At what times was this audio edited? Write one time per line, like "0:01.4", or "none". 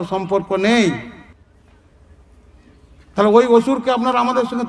0:01.3